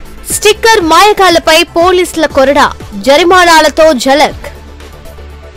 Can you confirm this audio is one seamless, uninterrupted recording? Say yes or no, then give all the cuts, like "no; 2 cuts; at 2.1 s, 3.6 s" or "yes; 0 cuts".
yes; 0 cuts